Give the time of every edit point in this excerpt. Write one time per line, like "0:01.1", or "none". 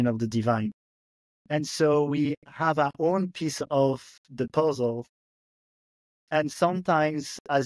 none